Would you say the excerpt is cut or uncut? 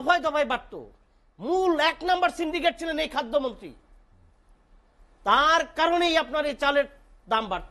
uncut